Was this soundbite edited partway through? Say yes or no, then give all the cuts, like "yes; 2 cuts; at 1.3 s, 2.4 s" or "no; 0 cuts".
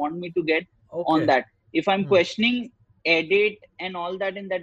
no; 0 cuts